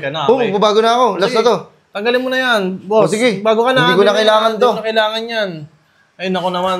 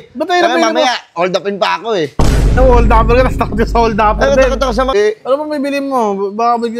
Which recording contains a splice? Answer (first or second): second